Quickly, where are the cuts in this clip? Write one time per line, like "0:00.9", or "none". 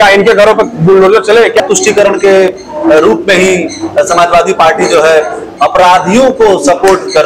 0:01.6